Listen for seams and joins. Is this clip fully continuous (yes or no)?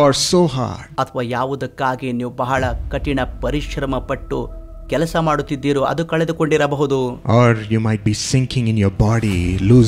yes